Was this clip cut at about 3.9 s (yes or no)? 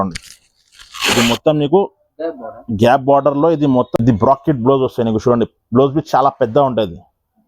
yes